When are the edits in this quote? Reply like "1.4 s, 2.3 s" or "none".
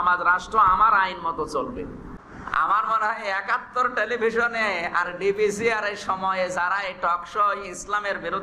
2.1 s